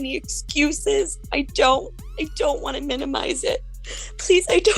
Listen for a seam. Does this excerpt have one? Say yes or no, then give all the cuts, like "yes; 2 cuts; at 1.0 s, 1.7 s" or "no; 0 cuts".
yes; 1 cut; at 3.8 s